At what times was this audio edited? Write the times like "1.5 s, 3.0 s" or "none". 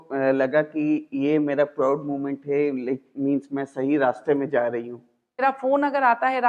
5.4 s